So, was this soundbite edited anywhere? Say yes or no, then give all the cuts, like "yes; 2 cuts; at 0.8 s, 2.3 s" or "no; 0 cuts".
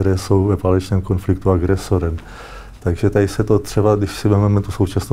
no; 0 cuts